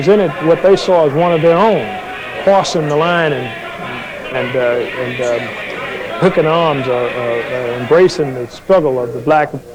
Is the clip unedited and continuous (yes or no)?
yes